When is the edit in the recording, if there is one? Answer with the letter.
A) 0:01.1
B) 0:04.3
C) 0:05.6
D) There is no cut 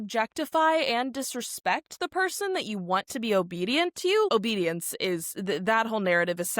B